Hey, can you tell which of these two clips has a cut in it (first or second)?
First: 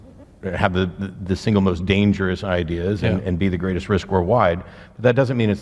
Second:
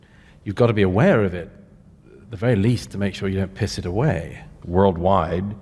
second